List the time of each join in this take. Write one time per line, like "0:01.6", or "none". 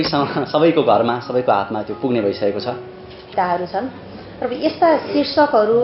0:03.3